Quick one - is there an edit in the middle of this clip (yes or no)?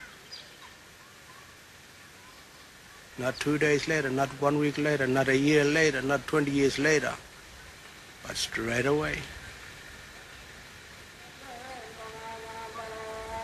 no